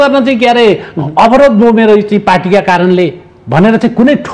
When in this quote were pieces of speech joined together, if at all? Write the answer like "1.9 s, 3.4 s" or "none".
none